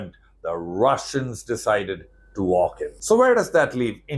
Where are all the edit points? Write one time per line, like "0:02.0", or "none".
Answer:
0:02.9